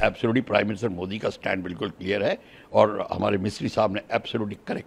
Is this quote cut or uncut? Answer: uncut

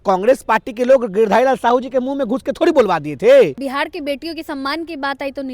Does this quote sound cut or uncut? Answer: cut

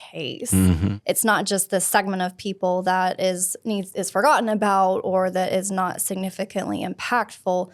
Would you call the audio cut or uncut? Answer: cut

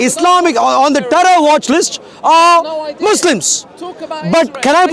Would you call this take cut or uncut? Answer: uncut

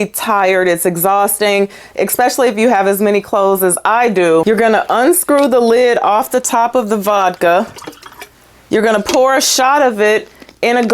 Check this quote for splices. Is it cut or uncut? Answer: cut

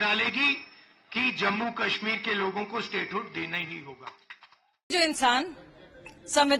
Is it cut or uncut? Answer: uncut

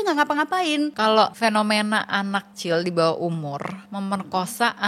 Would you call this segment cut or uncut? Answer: cut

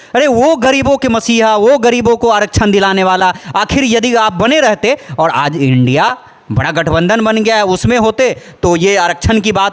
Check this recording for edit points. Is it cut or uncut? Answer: uncut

